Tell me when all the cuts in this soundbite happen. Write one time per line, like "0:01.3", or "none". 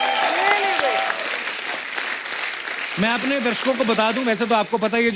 0:02.9